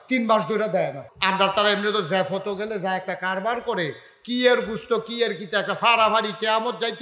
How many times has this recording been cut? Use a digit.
1